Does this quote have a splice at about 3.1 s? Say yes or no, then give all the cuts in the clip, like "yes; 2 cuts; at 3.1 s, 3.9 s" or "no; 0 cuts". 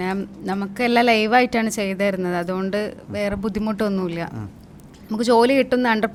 no; 0 cuts